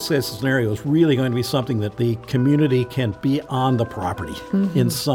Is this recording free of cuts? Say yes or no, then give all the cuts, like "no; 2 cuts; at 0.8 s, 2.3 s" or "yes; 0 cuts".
no; 2 cuts; at 1.9 s, 3.1 s